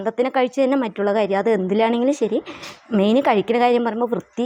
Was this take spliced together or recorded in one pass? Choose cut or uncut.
uncut